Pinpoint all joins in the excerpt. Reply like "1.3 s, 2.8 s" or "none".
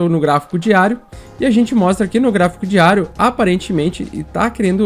none